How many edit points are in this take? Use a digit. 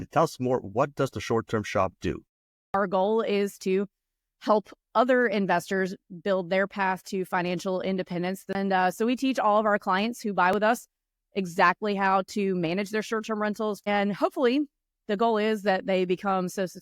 3